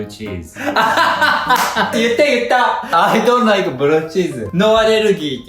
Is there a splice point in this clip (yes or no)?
yes